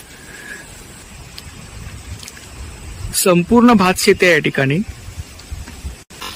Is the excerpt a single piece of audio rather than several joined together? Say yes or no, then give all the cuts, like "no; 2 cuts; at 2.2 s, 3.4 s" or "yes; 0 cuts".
no; 1 cut; at 1.0 s